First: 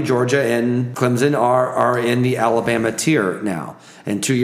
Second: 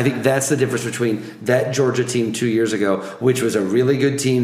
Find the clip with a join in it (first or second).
first